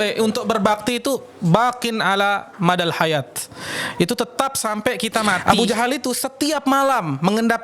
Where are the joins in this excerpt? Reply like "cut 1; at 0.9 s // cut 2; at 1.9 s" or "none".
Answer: cut 1; at 5.4 s